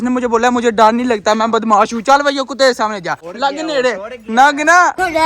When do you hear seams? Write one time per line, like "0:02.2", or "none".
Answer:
0:03.2